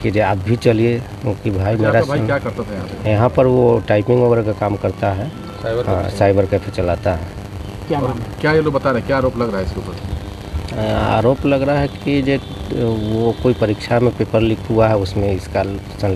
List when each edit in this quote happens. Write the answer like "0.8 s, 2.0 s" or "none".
none